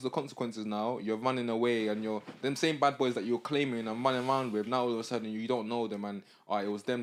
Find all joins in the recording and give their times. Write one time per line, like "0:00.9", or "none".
none